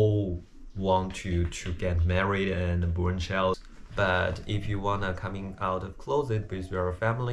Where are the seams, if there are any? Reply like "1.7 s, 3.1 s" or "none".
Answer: 3.6 s